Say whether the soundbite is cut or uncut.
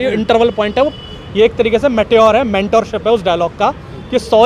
uncut